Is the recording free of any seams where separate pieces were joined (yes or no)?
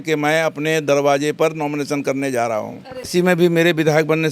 no